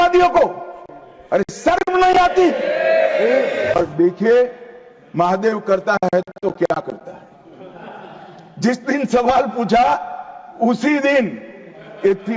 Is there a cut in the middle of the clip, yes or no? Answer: yes